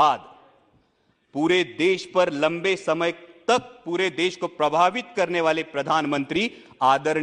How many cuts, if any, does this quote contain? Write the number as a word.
zero